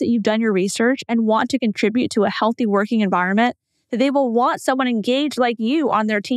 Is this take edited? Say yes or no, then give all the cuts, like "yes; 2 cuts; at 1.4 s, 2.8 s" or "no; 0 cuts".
no; 0 cuts